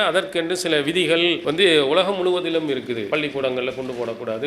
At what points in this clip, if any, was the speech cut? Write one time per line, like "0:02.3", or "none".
0:01.4
0:03.0